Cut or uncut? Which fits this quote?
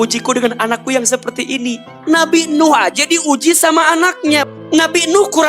cut